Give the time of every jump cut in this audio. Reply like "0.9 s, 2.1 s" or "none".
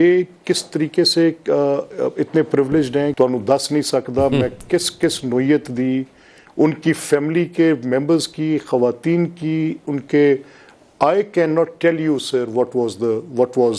3.1 s